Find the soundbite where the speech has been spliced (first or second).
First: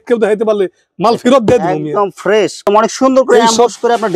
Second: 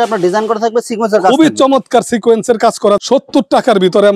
first